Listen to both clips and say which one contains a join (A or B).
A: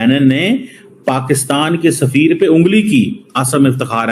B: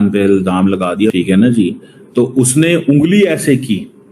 B